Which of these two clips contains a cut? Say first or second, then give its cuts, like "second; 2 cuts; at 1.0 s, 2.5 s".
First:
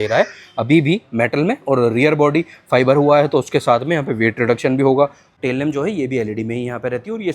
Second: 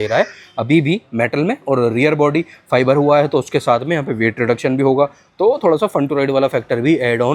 first; 1 cut; at 5.2 s